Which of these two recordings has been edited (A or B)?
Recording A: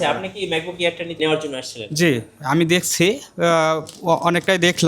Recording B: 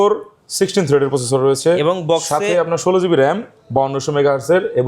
A